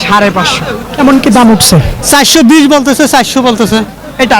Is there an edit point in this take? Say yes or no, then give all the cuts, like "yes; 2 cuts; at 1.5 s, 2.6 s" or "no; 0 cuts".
no; 0 cuts